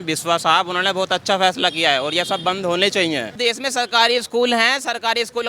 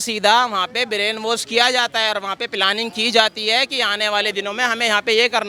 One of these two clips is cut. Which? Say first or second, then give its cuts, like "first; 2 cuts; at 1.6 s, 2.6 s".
first; 1 cut; at 3.4 s